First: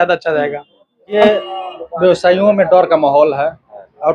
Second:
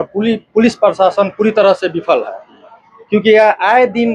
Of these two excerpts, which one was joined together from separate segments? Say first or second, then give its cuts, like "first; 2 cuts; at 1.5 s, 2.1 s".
first; 1 cut; at 1.1 s